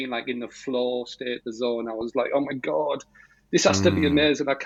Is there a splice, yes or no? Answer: no